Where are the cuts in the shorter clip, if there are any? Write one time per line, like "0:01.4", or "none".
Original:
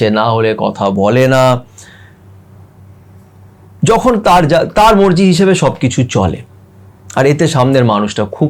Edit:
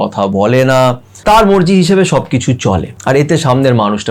0:01.2
0:02.9